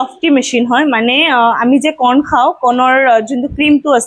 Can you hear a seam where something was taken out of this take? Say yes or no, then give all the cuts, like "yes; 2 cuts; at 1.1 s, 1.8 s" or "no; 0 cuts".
no; 0 cuts